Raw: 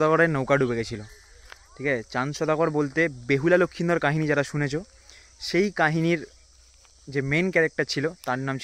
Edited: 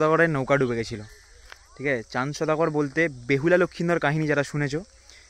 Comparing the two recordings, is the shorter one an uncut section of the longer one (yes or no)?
yes